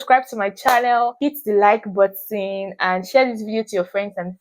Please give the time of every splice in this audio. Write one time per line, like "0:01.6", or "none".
0:01.2